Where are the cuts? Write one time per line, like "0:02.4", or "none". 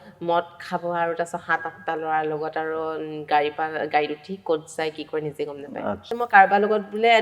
0:06.2